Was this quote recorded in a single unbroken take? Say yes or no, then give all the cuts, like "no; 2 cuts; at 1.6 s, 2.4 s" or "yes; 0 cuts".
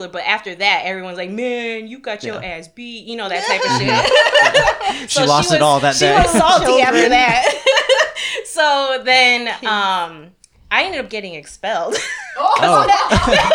yes; 0 cuts